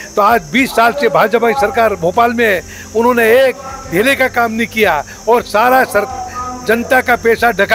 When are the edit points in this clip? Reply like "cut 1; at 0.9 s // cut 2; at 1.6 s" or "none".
none